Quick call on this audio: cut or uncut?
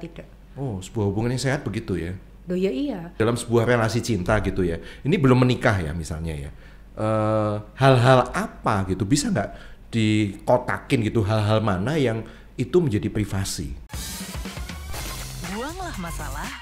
cut